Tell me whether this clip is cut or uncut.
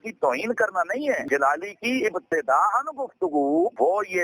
cut